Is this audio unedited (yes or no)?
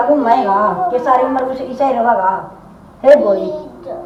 yes